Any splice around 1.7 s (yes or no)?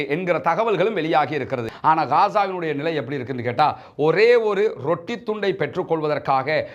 yes